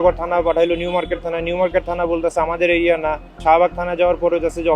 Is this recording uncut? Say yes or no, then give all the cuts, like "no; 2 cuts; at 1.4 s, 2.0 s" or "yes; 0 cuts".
no; 1 cut; at 3.4 s